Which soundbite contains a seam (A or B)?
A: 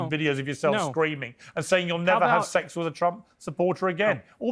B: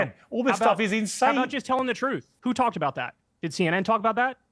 B